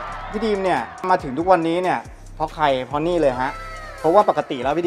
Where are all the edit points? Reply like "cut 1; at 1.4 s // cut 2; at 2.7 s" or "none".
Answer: cut 1; at 1.1 s